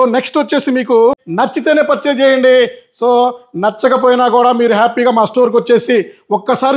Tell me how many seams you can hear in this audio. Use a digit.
1